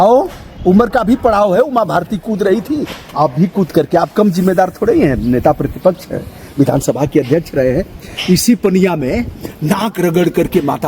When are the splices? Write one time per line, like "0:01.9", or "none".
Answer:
none